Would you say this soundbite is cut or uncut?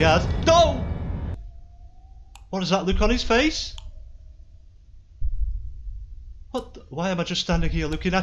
cut